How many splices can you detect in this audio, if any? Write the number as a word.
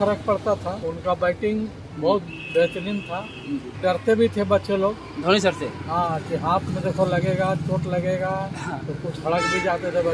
three